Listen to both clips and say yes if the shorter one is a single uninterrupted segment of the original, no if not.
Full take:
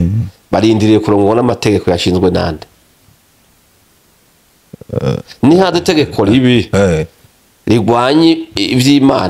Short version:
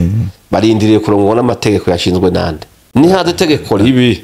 no